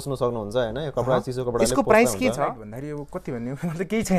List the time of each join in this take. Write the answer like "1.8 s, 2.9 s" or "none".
2.7 s

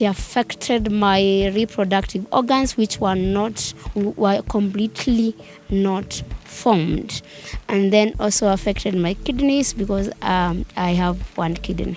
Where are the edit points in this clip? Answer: none

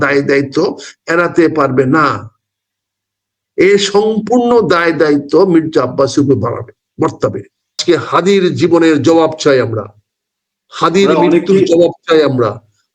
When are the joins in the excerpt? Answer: 7.8 s

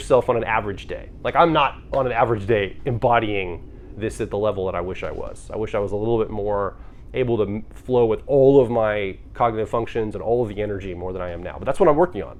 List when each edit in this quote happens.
none

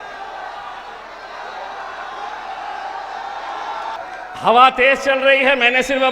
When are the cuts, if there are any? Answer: 4.0 s

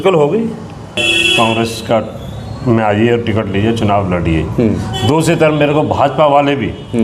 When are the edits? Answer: 1.1 s

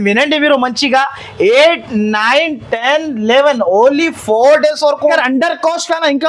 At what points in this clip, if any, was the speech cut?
5.1 s

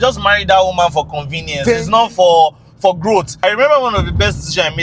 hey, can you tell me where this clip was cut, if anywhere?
3.3 s

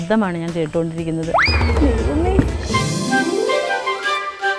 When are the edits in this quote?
2.7 s

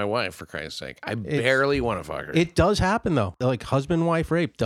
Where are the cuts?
3.4 s

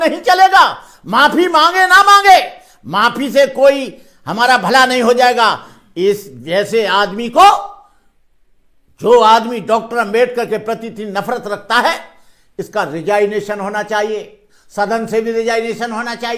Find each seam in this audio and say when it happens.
none

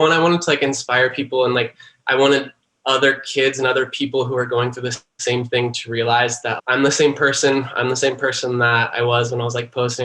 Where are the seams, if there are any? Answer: 6.6 s

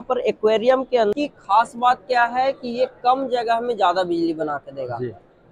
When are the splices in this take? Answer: 1.1 s

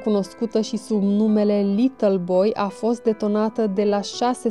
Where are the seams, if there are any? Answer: none

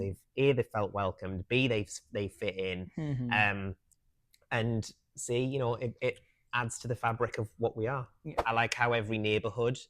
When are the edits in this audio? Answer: 8.4 s

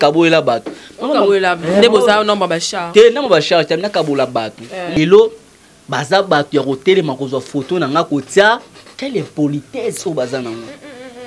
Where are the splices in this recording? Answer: 5.0 s

